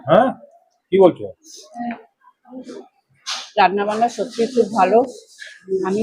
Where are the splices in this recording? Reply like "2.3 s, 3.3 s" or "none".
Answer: none